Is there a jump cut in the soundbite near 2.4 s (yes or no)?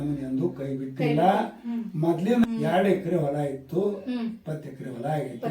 yes